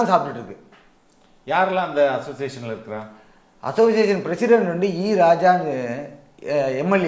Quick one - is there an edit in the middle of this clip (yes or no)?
no